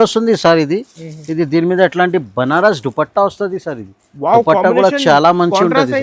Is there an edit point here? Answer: no; 0 cuts

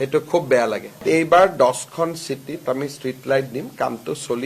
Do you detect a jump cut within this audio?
yes; 2 cuts; at 1.0 s, 2.6 s

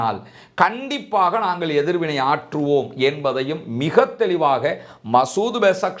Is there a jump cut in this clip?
no; 0 cuts

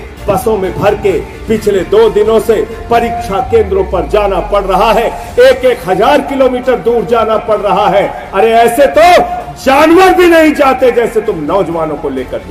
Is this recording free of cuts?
yes; 0 cuts

